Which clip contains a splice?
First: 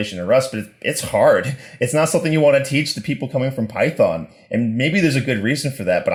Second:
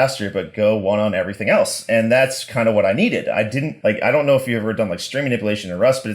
second; 1 cut; at 3.7 s

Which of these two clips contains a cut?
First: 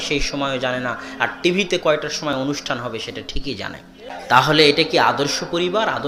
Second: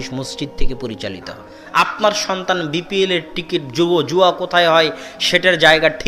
second; 1 cut; at 1.6 s

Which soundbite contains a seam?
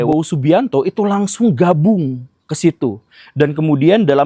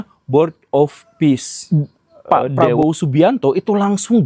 second; 1 cut; at 1.5 s

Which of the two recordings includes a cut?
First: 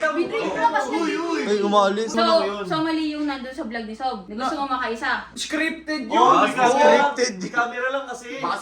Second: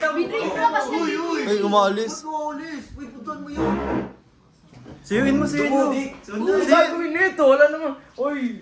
first; 1 cut; at 2.1 s

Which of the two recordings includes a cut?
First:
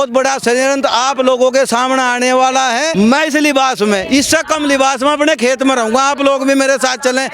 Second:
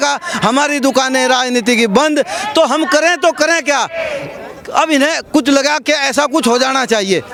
first; 1 cut; at 2.9 s

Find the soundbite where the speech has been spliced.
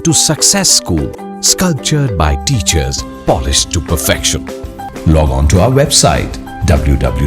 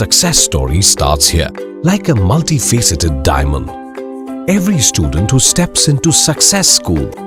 first; 1 cut; at 4.8 s

